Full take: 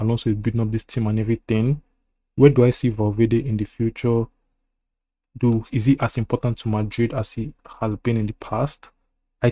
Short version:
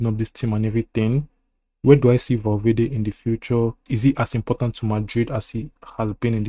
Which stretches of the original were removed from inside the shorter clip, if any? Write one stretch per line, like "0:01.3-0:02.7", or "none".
0:04.4-0:05.7